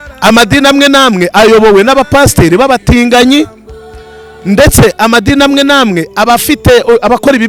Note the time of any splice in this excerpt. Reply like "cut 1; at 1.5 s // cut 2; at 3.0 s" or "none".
none